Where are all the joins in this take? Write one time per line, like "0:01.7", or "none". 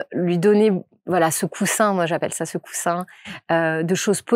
none